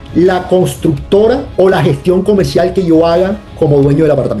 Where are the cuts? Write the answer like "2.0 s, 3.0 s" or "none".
none